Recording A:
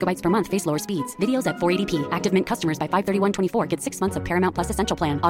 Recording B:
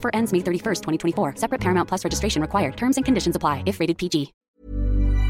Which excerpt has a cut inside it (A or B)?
B